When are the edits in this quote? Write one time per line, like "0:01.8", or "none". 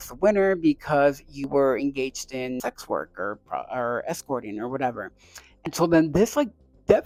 none